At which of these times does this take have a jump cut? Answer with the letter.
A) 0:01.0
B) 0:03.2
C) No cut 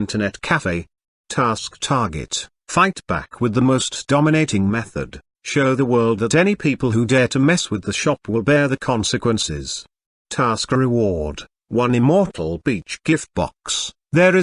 A